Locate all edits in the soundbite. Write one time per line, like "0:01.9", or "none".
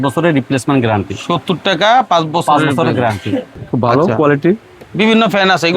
0:03.6